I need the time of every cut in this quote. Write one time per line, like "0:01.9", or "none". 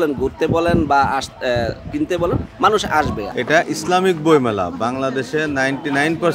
0:03.2

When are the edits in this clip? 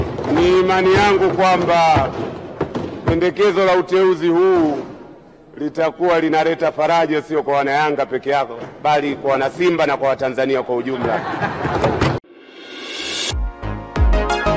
0:12.2

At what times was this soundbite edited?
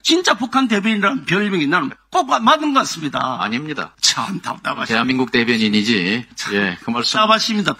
0:04.0
0:06.3

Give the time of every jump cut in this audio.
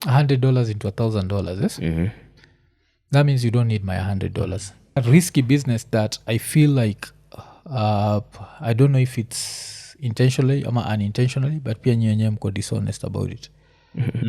0:05.0

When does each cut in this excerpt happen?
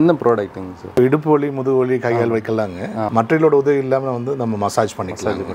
0:01.0
0:03.1

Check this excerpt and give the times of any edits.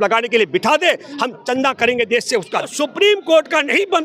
0:02.7

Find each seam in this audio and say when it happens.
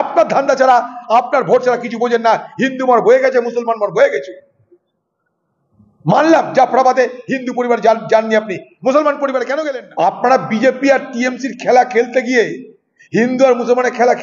0:09.6

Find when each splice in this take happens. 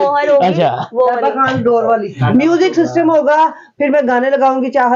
0:02.2

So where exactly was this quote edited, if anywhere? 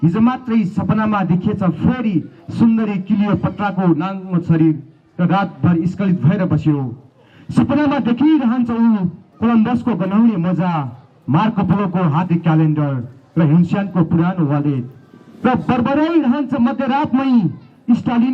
none

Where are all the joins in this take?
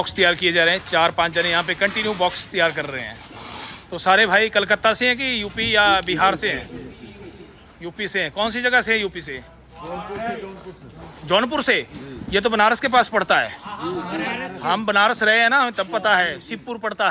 none

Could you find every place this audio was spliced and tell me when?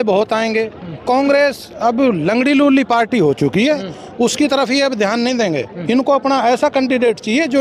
none

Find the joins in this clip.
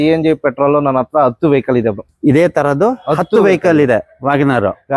none

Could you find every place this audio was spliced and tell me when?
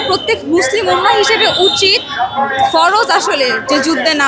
none

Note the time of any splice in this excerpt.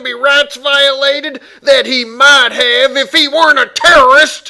none

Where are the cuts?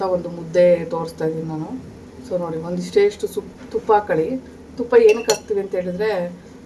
none

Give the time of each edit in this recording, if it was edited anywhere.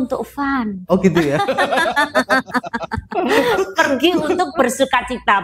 none

